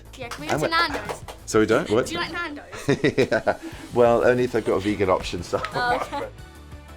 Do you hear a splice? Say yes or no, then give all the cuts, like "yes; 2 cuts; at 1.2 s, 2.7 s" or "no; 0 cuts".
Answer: no; 0 cuts